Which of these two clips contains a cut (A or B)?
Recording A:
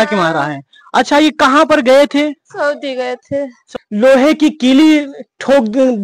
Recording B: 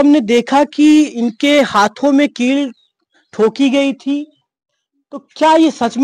A